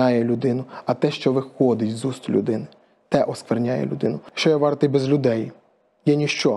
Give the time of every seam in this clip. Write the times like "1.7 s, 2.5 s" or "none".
4.3 s